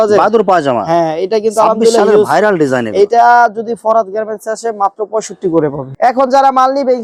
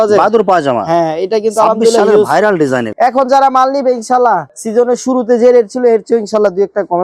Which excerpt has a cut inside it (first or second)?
second